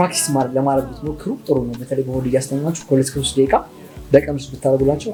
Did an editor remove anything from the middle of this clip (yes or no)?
no